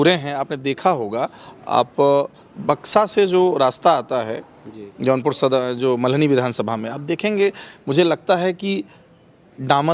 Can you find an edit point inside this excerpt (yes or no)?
no